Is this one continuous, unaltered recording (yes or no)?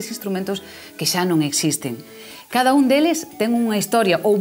no